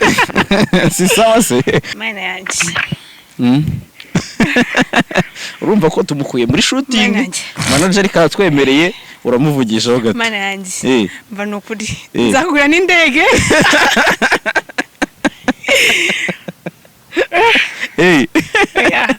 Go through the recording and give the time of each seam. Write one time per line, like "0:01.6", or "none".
0:01.9